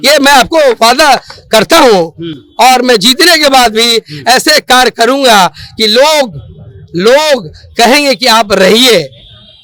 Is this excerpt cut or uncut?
uncut